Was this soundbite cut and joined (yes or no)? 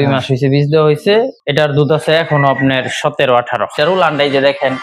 yes